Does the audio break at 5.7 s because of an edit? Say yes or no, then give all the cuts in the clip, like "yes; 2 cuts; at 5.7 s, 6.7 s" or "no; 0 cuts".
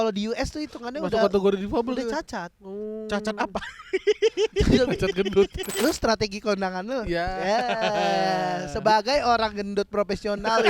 yes; 1 cut; at 5.7 s